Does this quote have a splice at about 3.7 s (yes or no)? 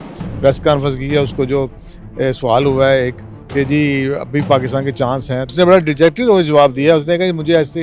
no